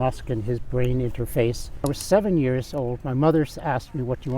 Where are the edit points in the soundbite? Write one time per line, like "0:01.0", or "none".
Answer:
0:01.9